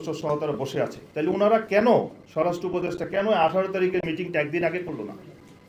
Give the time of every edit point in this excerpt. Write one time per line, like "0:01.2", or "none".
0:01.1